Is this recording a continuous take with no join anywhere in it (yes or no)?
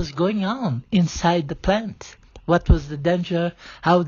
yes